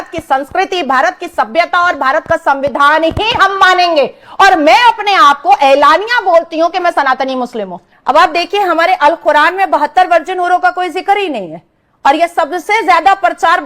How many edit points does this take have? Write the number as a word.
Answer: one